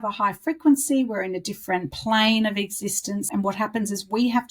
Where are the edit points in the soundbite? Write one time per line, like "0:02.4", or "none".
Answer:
0:01.9
0:03.3

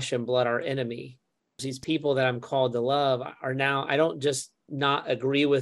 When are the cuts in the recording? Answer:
0:01.7

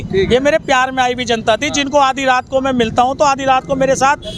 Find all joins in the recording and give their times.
none

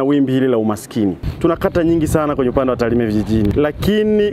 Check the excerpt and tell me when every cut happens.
0:01.3
0:03.5

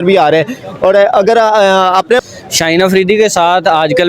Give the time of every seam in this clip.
0:02.2

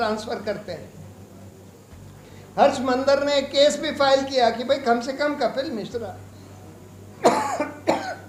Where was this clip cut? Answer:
none

